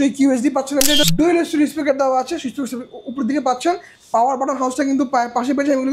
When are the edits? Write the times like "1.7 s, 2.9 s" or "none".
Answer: 1.0 s